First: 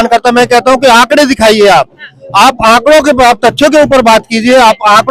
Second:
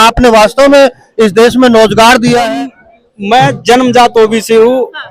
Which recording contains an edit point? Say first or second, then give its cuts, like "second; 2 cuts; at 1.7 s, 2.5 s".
second; 1 cut; at 2.5 s